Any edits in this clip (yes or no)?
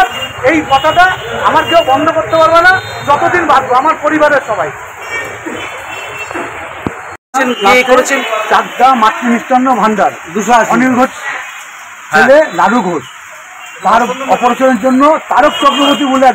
yes